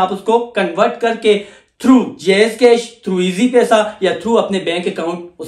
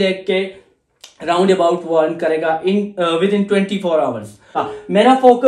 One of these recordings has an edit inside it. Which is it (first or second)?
second